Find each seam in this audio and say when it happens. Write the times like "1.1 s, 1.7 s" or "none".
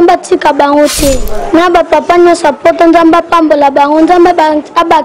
1.3 s